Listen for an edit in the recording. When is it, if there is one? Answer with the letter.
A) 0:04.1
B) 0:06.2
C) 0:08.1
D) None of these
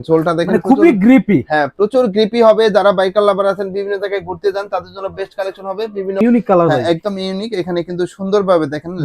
B